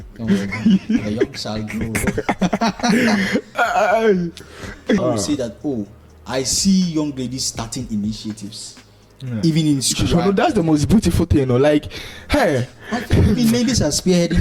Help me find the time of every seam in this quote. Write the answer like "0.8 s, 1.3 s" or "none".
5.0 s